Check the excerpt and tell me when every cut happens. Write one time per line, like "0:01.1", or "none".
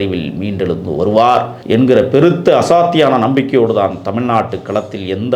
0:01.6